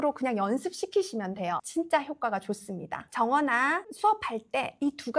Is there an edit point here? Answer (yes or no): yes